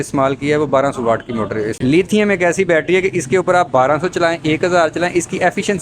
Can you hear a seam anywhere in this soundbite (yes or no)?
yes